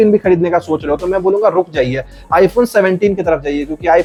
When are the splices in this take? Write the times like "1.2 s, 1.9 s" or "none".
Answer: none